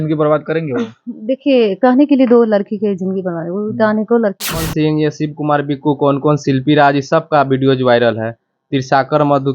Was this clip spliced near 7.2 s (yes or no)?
no